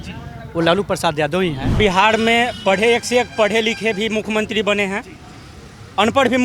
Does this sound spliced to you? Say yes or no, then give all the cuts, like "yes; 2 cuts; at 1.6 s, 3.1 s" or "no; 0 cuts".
yes; 1 cut; at 1.7 s